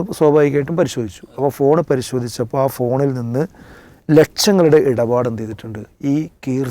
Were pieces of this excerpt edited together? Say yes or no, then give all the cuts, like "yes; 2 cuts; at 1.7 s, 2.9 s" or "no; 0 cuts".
no; 0 cuts